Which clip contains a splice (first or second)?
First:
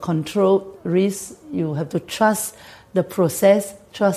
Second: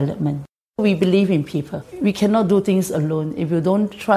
second